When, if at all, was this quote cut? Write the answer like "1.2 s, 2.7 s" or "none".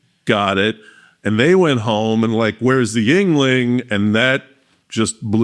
none